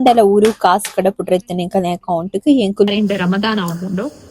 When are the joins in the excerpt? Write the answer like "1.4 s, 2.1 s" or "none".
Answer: 2.9 s

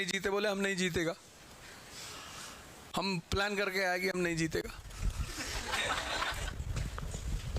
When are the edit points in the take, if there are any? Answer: 6.4 s

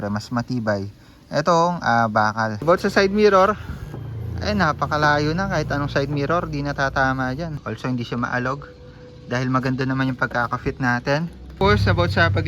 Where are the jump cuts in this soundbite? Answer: 2.6 s, 7.6 s, 11.5 s

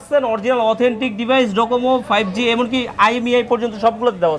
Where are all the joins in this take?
none

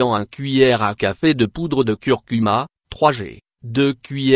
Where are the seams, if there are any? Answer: 1.7 s, 3.6 s

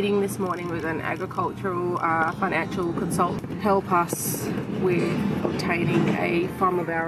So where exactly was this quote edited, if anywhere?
3.4 s

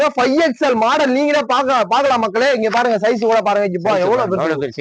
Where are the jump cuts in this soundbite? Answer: none

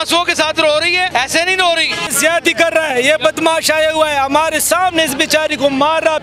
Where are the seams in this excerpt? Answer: 1.1 s, 2.1 s

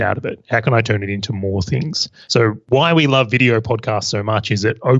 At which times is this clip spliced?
2.4 s

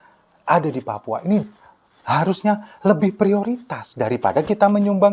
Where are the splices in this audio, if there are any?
none

